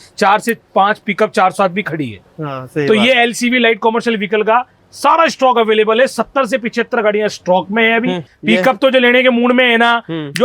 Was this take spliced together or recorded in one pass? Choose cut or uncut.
cut